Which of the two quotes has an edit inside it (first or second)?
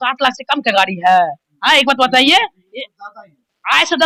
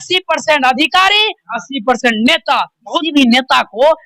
second